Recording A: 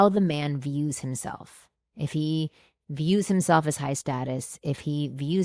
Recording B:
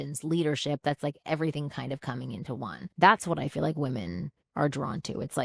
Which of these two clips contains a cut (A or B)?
B